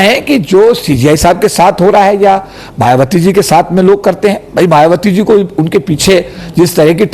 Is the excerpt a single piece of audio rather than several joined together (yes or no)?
yes